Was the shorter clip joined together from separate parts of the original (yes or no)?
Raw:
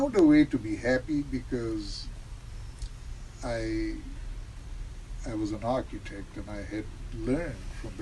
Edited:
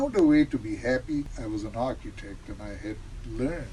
yes